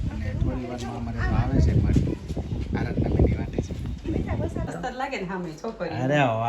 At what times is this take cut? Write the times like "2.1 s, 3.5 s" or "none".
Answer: 4.7 s